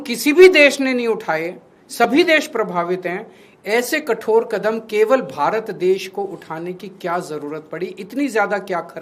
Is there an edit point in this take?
no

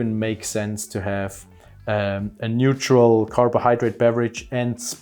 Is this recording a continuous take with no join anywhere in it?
yes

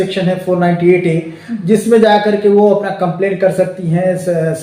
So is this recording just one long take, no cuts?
yes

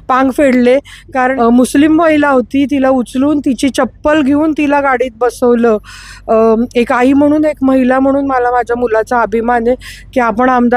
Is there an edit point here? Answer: yes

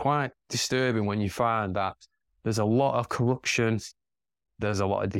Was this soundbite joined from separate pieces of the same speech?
no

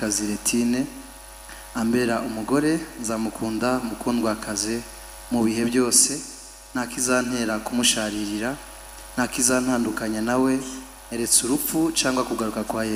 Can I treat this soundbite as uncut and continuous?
yes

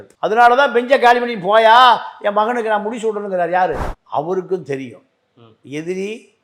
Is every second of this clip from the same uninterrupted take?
no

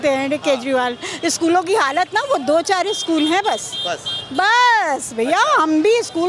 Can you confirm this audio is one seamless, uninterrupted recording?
yes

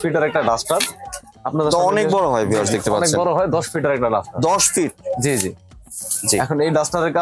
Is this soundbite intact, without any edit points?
yes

